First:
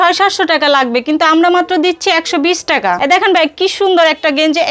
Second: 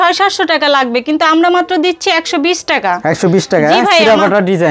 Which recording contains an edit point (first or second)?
first